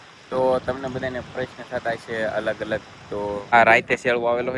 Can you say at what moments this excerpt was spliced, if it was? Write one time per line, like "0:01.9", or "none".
0:03.5